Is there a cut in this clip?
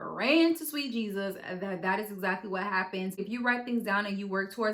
yes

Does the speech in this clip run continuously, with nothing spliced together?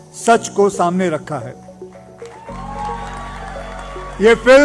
yes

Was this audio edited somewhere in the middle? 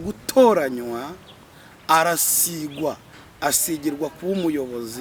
no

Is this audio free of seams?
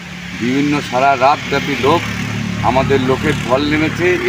yes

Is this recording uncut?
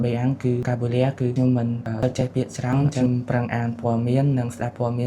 no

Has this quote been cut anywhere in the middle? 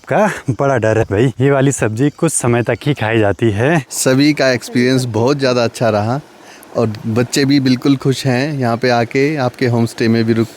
yes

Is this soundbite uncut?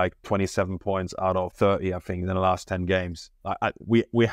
no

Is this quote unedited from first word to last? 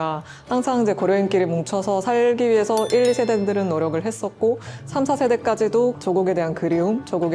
no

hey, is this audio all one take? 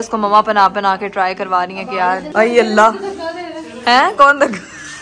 no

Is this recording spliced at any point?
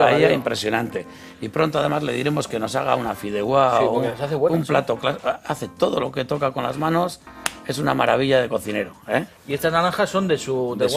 no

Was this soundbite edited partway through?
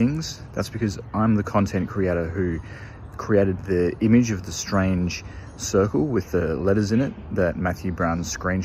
no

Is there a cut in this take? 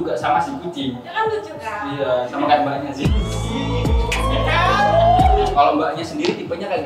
yes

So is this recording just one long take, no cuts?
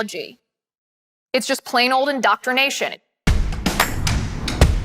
no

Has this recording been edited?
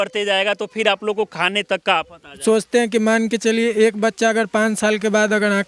yes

